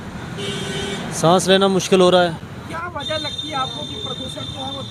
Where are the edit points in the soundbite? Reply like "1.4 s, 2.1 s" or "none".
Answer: none

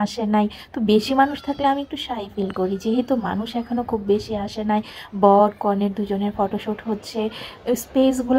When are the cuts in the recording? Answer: none

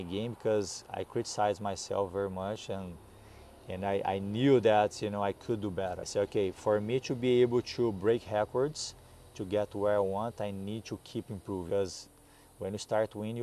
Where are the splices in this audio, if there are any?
6.0 s, 11.7 s

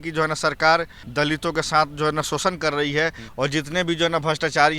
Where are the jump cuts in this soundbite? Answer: 1.0 s, 3.2 s

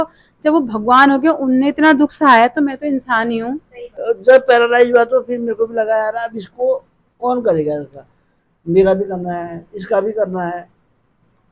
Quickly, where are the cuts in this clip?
3.9 s

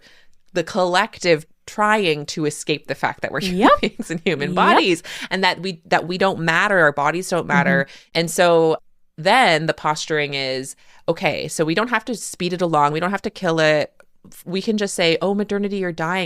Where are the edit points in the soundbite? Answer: 1.6 s, 8.0 s

